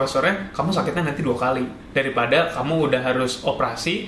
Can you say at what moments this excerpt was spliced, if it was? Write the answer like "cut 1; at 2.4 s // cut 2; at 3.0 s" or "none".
cut 1; at 1.8 s